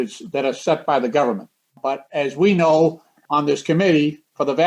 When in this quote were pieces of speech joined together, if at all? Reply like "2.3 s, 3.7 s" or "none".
2.1 s, 3.2 s